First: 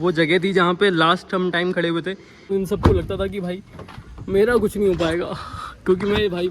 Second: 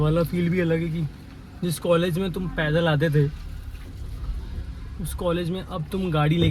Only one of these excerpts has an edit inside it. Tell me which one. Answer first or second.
first